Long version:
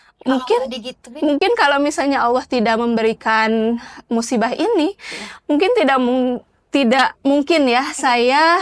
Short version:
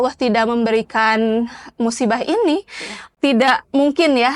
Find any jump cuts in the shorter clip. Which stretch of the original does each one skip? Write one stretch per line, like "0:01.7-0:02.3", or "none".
0:05.3-0:06.5